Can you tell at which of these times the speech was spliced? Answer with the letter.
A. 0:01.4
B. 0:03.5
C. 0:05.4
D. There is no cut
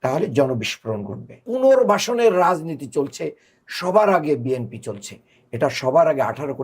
A